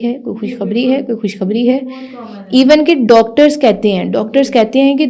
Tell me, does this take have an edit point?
no; 0 cuts

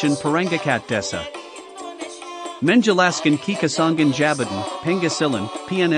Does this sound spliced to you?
yes; 2 cuts; at 1.0 s, 2.6 s

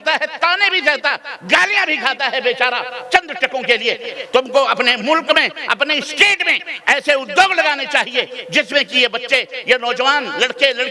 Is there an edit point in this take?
yes; 1 cut; at 4.1 s

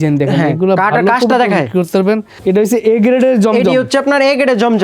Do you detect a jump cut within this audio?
yes; 1 cut; at 2.3 s

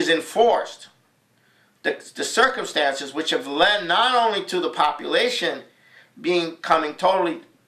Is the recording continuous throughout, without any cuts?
no; 1 cut; at 3.5 s

